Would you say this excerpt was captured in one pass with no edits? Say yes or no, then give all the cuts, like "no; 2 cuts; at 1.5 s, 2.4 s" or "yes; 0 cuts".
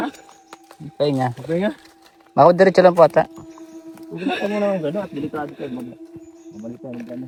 yes; 0 cuts